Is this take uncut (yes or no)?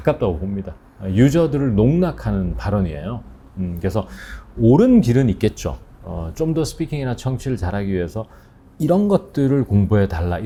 yes